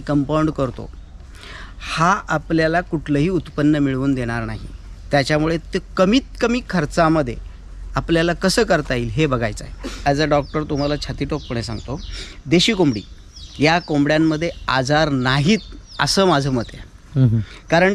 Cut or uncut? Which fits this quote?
cut